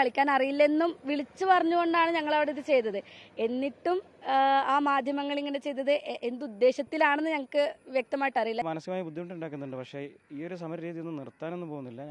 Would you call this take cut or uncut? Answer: cut